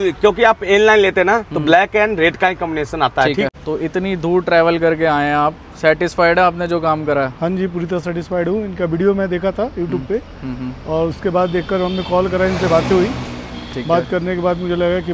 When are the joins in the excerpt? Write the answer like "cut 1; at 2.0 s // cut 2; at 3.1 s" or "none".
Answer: cut 1; at 3.5 s